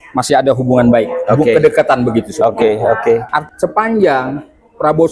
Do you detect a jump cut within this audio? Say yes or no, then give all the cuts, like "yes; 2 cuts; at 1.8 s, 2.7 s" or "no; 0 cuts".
yes; 1 cut; at 3.3 s